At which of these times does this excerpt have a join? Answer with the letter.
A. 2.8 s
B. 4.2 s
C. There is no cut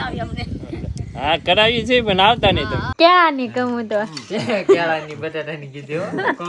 A